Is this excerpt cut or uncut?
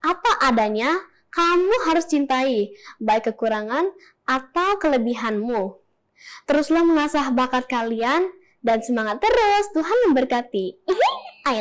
uncut